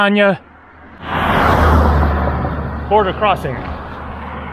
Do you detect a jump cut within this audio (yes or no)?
yes